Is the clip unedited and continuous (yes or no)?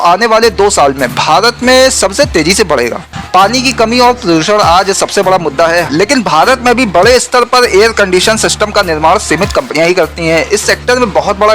no